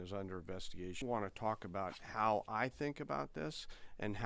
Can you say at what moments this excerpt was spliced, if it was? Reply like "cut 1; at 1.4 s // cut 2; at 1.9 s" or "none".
cut 1; at 1.0 s